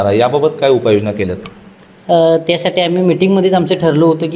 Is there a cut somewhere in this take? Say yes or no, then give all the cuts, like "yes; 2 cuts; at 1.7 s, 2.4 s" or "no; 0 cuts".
no; 0 cuts